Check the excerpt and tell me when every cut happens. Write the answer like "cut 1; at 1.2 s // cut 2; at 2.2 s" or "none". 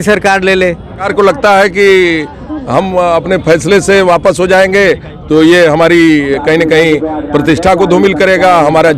cut 1; at 1.1 s